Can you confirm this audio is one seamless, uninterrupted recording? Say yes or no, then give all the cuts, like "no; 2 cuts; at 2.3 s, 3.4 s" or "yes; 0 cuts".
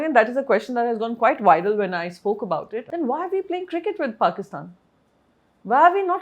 no; 1 cut; at 2.8 s